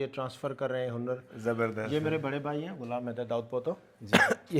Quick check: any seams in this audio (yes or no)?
no